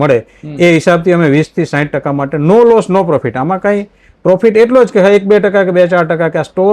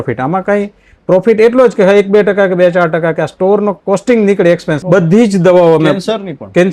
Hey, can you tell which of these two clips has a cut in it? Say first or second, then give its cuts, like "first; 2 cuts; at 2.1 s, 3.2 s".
second; 1 cut; at 4.7 s